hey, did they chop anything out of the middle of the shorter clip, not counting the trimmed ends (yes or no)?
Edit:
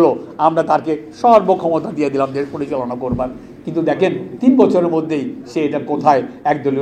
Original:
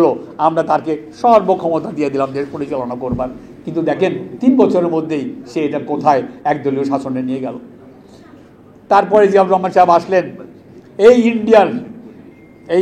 no